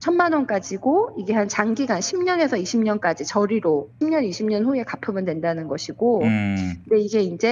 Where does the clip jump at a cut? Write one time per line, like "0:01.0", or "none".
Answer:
0:03.9